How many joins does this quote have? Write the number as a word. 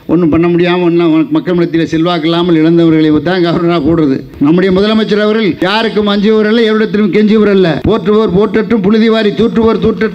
three